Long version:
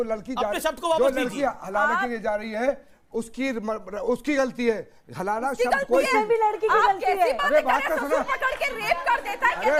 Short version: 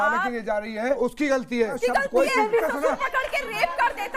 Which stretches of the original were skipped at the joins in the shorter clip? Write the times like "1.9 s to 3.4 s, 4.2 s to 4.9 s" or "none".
2.7 s to 4.0 s, 4.8 s to 5.5 s, 6.4 s to 7.9 s